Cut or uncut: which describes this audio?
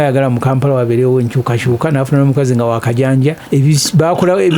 cut